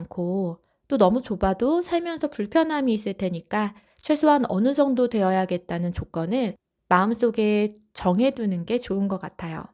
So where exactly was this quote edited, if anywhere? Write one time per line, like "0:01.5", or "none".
0:06.7